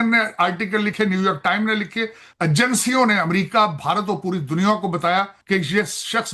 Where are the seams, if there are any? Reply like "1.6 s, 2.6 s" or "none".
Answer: 5.4 s